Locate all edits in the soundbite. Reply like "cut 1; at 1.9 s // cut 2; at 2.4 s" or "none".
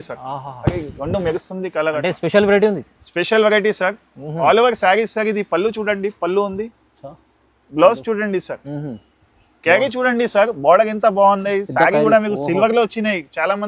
none